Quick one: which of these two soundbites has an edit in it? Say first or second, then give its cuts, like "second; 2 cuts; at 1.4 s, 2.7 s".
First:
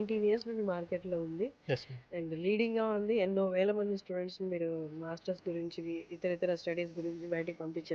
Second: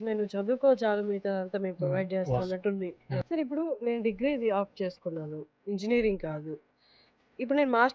second; 1 cut; at 3.2 s